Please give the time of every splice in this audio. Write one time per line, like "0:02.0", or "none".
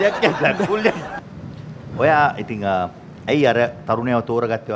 0:01.1